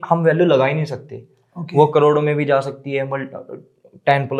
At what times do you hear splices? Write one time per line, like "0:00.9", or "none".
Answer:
none